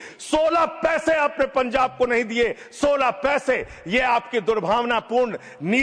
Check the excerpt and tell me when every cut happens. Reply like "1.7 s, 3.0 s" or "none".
none